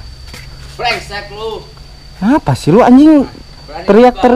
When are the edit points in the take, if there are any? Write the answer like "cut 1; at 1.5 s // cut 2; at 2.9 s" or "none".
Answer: none